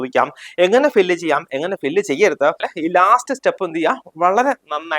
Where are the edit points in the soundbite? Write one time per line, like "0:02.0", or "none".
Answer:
0:02.7